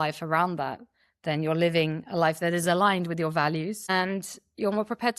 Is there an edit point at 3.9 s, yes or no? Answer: yes